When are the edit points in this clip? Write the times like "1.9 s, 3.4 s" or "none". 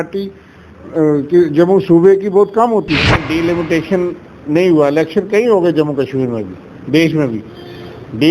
3.2 s